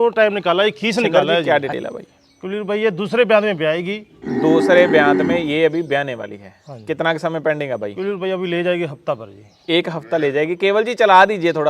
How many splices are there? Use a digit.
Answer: 1